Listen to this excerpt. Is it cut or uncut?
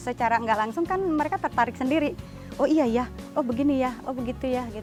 uncut